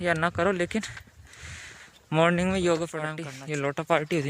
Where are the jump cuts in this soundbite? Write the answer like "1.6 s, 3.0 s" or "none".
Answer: 3.3 s

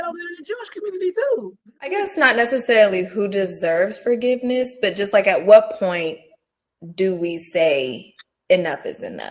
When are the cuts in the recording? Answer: 2.0 s

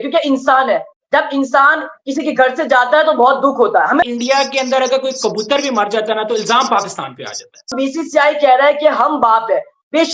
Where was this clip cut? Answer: 4.0 s, 7.7 s

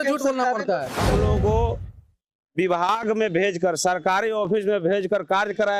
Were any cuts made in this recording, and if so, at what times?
1.0 s

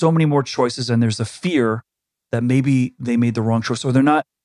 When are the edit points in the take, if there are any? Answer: none

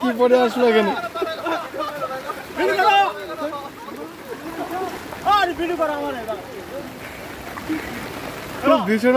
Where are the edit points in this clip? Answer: 5.0 s

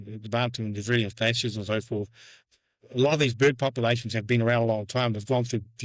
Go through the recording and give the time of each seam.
2.4 s

